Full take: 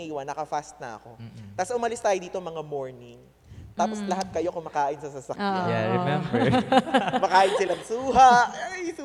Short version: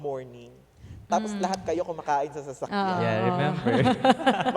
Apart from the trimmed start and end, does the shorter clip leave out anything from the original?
no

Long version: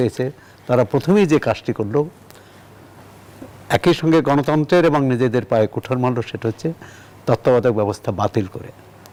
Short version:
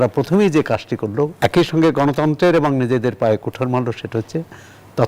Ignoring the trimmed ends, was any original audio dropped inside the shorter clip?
yes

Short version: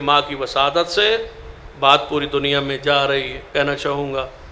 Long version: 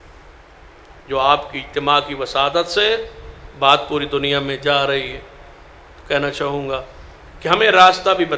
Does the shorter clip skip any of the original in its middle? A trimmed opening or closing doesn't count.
yes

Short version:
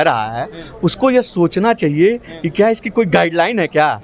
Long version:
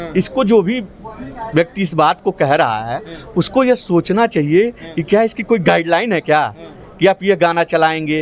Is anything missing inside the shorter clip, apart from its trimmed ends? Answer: no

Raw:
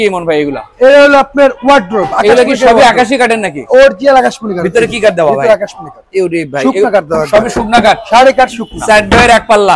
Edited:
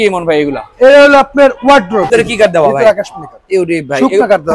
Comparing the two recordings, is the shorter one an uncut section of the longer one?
no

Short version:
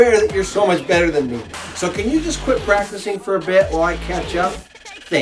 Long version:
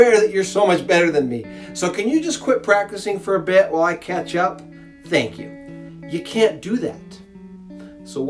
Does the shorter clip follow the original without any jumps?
yes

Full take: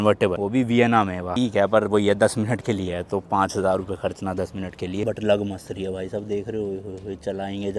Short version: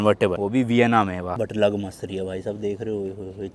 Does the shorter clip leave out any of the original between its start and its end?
yes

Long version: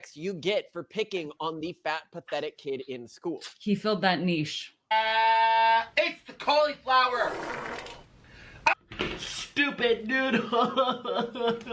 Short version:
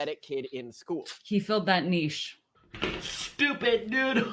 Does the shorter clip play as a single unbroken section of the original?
no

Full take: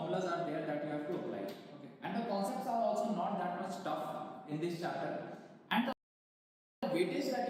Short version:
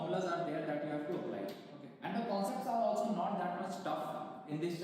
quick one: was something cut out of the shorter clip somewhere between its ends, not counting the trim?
no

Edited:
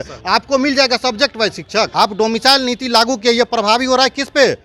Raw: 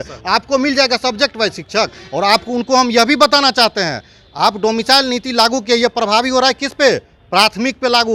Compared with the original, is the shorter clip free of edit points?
no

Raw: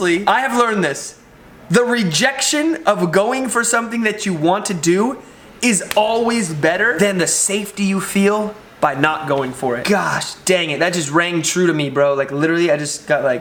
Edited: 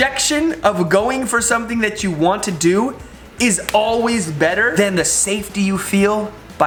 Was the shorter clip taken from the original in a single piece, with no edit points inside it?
yes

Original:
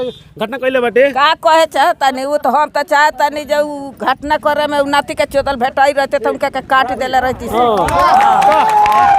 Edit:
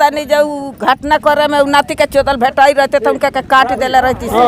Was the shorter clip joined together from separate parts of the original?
no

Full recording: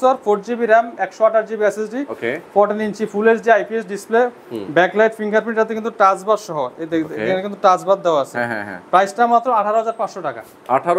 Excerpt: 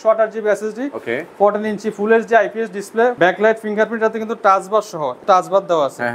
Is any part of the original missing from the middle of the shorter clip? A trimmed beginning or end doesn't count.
yes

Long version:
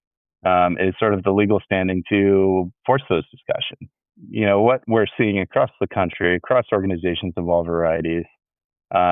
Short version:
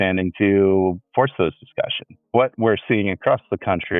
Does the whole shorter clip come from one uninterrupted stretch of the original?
no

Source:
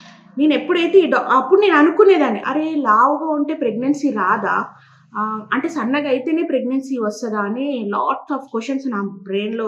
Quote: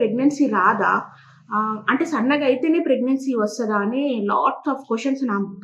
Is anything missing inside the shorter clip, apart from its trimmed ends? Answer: no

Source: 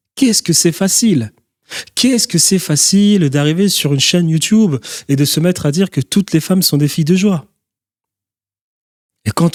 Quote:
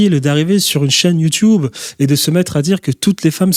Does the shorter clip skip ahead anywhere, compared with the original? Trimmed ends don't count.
no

